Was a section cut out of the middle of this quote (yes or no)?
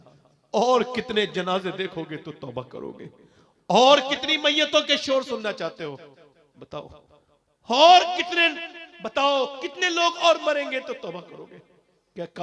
no